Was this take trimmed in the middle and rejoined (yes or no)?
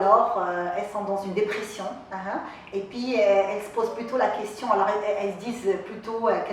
no